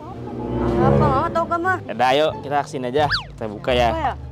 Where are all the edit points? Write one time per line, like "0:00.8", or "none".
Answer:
0:01.7
0:03.1